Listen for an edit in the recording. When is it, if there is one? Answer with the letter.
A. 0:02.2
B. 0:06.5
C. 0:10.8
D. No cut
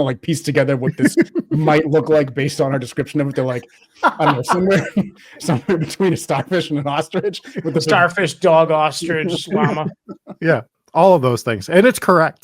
C